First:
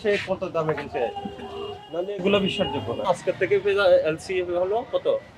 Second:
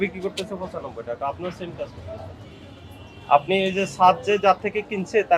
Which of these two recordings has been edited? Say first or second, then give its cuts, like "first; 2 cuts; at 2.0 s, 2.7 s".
first; 1 cut; at 3.0 s